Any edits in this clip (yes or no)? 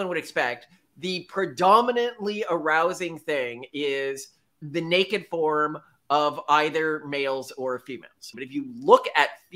yes